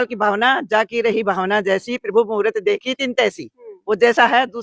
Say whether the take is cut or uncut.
uncut